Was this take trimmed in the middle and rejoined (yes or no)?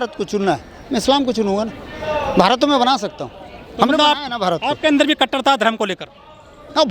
no